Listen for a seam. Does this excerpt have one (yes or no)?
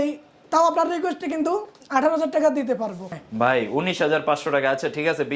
yes